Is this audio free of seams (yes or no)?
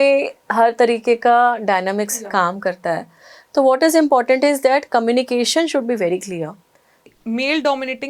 no